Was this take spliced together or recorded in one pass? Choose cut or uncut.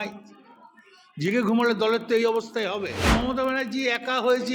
cut